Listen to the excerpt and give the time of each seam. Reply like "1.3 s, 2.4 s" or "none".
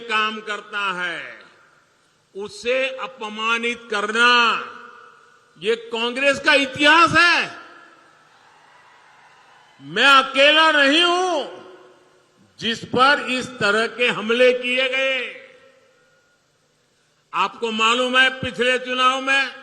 none